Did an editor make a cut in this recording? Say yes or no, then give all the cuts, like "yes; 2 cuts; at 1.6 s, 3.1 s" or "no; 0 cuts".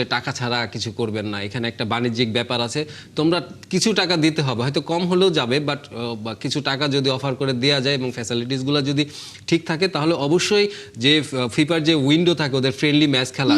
no; 0 cuts